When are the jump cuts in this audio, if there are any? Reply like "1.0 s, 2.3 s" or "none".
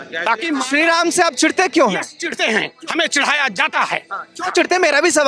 none